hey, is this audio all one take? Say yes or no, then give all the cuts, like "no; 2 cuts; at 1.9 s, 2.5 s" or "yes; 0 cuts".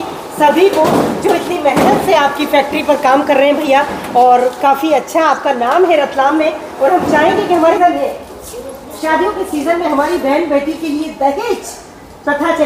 no; 1 cut; at 7.8 s